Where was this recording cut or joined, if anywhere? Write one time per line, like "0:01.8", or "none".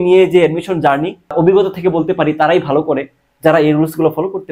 0:01.3